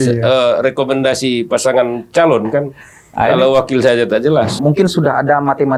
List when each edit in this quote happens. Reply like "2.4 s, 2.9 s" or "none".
4.6 s

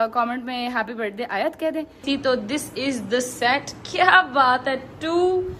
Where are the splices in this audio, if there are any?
2.0 s

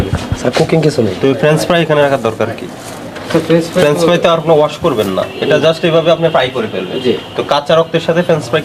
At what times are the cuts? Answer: none

